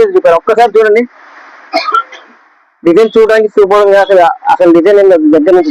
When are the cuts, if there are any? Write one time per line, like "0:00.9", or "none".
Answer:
none